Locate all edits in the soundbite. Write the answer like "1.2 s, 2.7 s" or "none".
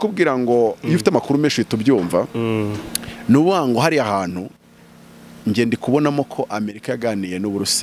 none